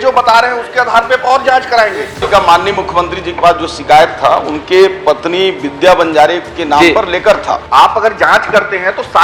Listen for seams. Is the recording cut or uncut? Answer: cut